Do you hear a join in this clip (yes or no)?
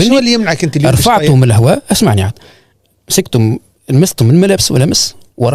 no